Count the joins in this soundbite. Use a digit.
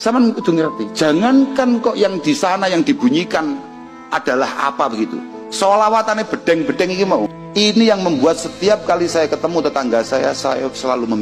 0